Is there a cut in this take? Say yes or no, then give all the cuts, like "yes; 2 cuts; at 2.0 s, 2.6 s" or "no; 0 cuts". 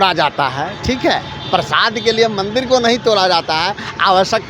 no; 0 cuts